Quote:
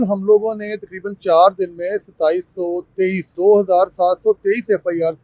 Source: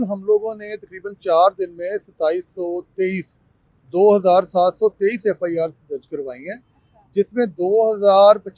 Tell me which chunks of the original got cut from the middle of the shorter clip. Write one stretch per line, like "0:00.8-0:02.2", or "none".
0:03.3-0:03.8